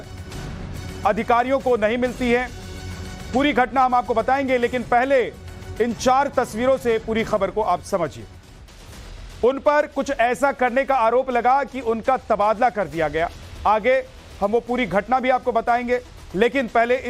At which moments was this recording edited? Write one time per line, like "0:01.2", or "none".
0:01.4